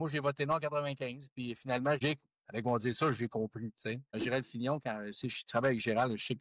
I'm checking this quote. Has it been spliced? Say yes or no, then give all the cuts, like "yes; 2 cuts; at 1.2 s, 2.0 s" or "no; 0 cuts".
yes; 2 cuts; at 2.0 s, 4.1 s